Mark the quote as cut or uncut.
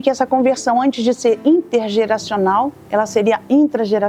uncut